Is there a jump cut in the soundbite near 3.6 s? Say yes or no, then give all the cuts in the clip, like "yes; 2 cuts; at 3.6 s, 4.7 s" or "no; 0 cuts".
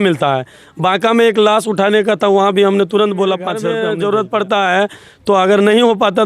yes; 1 cut; at 3.6 s